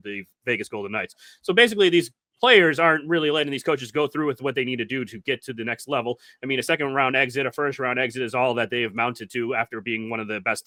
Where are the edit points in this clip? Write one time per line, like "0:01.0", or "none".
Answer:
none